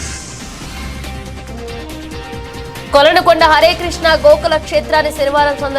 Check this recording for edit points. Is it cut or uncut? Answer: uncut